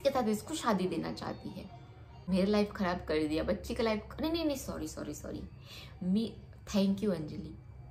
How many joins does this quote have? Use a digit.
1